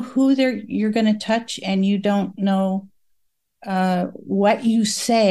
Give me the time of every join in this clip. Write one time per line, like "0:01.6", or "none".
none